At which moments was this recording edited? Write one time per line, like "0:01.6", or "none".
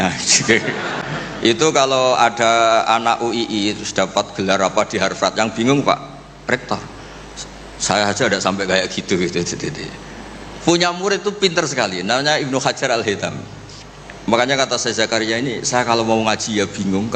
0:01.0